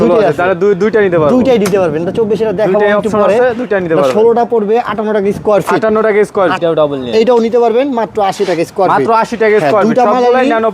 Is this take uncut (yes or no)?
no